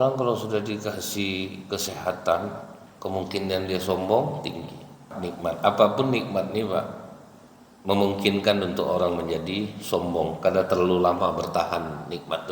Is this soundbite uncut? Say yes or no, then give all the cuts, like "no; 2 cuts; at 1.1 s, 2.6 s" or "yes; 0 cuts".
no; 1 cut; at 5.2 s